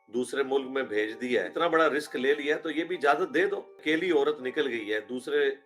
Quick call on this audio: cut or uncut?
cut